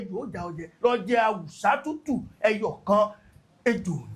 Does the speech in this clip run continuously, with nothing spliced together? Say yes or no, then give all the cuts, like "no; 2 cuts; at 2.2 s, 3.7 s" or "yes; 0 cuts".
yes; 0 cuts